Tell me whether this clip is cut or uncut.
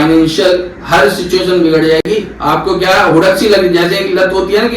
uncut